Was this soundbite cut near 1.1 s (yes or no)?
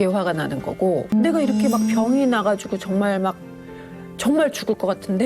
yes